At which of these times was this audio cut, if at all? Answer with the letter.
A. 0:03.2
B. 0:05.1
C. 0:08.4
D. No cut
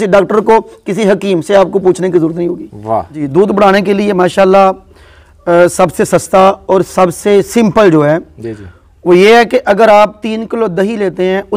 A